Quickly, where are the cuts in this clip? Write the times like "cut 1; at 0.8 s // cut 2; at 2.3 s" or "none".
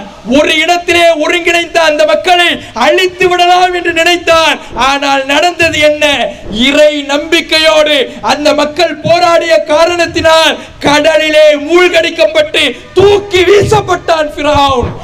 none